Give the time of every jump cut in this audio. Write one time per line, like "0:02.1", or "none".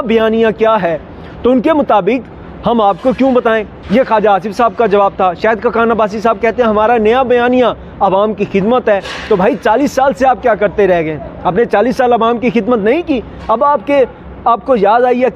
none